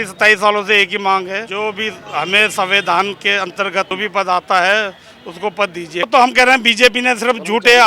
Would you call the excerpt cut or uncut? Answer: cut